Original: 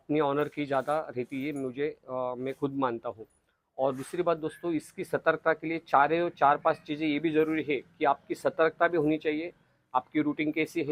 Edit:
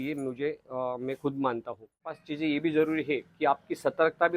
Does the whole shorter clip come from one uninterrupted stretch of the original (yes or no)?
no